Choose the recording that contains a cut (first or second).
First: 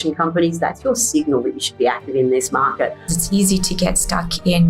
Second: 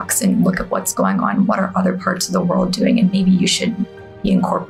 first